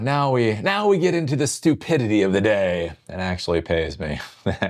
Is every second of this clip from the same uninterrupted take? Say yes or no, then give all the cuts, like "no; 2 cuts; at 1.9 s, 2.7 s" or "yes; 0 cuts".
no; 1 cut; at 3.4 s